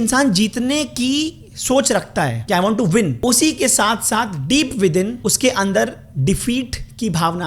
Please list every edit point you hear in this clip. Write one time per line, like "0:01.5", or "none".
0:02.4
0:03.2
0:05.1